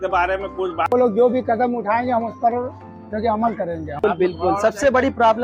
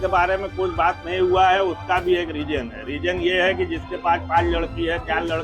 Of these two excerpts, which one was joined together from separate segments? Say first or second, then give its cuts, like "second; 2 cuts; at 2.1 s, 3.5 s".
first; 2 cuts; at 0.9 s, 4.0 s